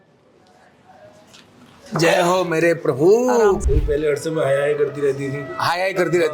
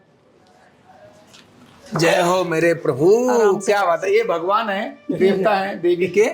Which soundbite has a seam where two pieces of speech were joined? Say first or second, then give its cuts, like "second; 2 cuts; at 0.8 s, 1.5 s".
first; 1 cut; at 3.6 s